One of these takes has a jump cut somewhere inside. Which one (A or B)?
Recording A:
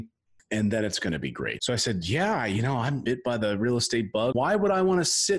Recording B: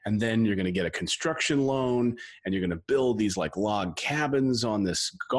A